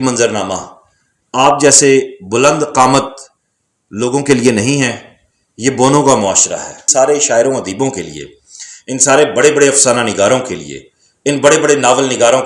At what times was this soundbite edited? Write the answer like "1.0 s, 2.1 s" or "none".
6.8 s